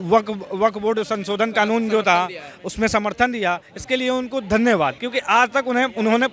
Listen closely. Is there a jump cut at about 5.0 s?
yes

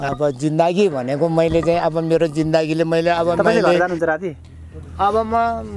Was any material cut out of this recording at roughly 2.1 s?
no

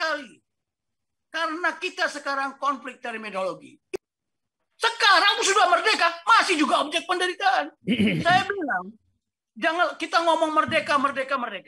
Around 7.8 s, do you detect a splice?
no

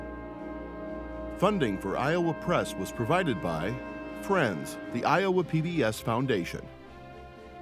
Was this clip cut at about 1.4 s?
yes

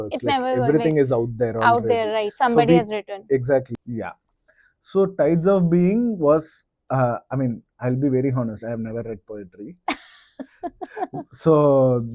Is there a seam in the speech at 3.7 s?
yes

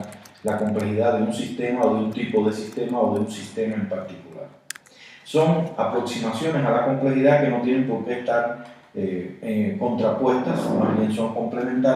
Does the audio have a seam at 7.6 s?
no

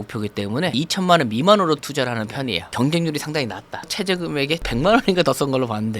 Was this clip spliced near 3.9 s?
yes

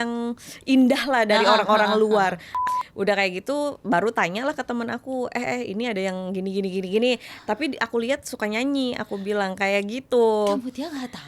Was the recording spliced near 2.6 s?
yes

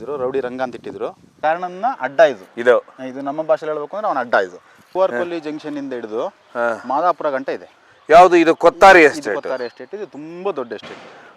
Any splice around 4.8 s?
yes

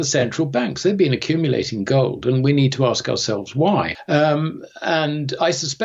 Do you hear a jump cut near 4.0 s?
yes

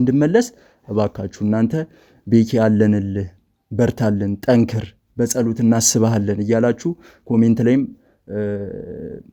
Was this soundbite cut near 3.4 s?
no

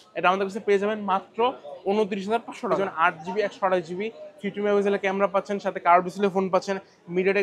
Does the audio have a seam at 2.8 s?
yes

